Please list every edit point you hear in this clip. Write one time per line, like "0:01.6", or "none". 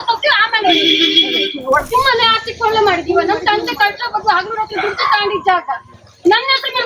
0:01.9